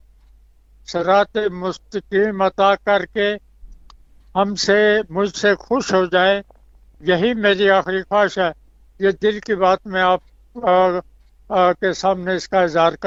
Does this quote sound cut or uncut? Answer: uncut